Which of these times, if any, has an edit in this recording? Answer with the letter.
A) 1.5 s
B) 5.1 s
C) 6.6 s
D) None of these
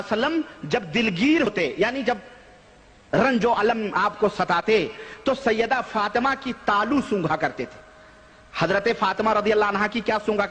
A